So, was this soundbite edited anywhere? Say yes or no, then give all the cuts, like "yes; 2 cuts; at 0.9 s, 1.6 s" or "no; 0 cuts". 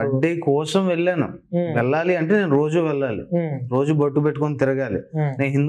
no; 0 cuts